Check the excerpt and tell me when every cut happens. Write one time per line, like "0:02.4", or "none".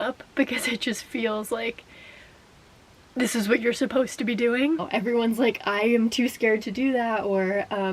0:04.9